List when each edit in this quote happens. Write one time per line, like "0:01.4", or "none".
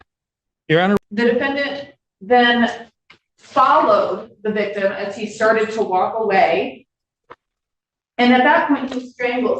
0:01.0